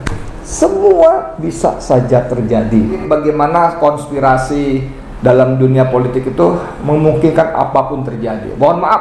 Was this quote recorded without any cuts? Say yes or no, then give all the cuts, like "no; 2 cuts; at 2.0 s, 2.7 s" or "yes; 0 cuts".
no; 1 cut; at 3.0 s